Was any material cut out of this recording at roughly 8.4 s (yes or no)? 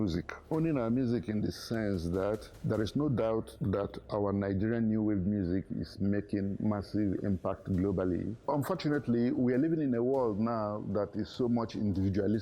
yes